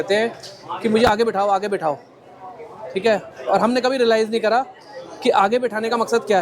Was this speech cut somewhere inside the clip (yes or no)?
no